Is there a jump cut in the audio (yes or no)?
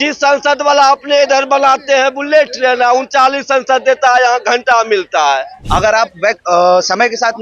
yes